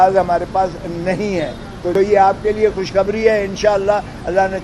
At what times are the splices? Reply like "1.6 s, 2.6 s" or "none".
1.8 s